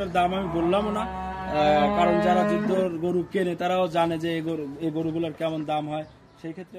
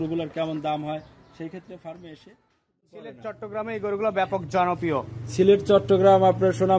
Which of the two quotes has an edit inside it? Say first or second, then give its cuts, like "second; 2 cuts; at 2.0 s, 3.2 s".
second; 1 cut; at 2.7 s